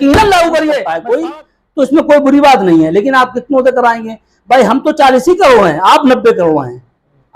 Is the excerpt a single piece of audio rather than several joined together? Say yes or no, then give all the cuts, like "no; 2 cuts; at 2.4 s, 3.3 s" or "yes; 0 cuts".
no; 1 cut; at 0.9 s